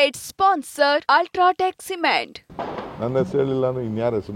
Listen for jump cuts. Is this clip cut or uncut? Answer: cut